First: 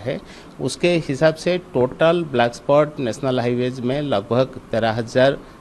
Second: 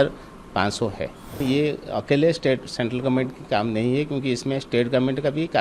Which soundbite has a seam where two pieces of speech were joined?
second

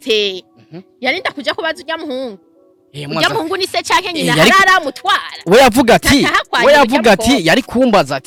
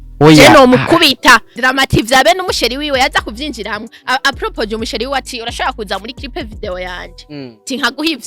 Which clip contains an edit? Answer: second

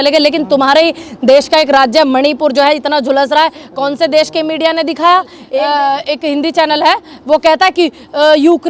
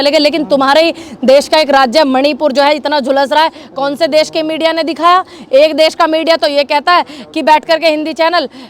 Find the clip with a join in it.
first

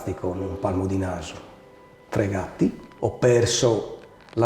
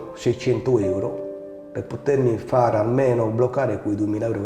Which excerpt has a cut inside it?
first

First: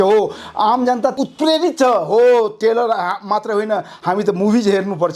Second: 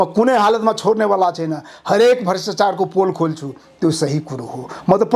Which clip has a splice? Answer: first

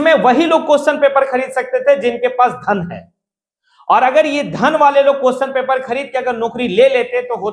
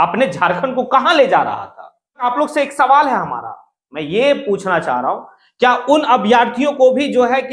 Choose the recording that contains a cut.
second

